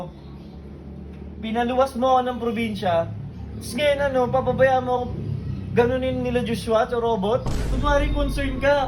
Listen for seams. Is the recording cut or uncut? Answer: cut